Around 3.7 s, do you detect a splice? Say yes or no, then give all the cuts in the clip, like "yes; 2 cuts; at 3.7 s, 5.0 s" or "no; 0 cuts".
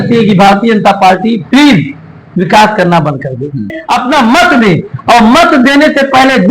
yes; 1 cut; at 3.7 s